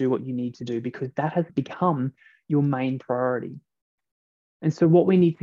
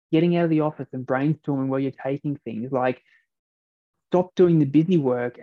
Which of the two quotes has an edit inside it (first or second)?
first